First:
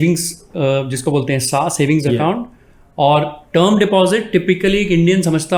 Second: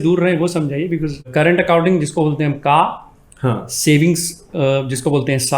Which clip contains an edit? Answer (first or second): second